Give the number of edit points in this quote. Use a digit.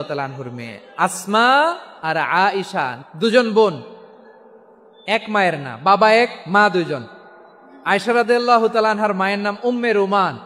2